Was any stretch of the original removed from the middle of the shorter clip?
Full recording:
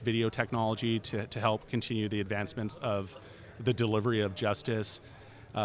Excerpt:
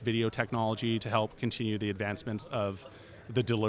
yes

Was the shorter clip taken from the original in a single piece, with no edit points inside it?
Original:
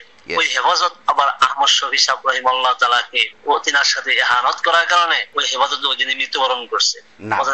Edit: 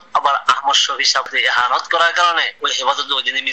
no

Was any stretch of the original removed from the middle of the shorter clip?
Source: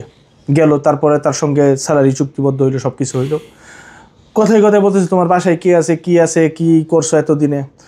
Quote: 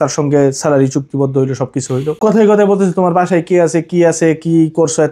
yes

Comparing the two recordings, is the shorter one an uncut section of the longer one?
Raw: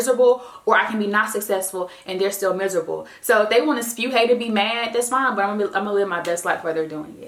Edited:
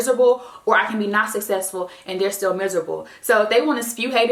yes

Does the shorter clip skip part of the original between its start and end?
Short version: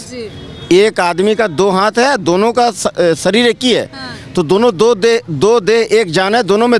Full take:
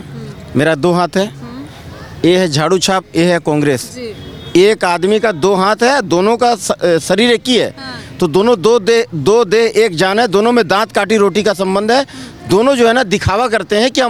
no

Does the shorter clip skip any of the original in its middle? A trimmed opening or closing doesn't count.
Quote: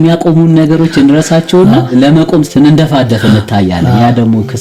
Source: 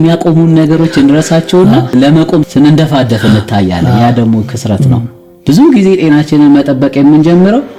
no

